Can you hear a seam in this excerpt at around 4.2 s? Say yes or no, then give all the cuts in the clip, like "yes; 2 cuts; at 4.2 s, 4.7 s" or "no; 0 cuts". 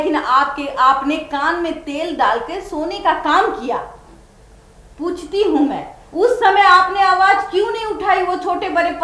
no; 0 cuts